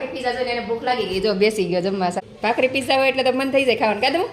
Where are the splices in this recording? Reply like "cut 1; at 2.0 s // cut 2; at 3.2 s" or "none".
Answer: cut 1; at 2.2 s